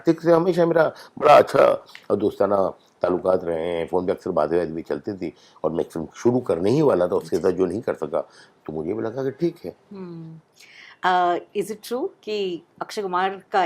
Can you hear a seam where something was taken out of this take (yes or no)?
no